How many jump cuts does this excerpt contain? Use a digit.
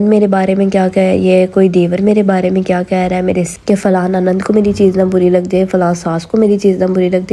1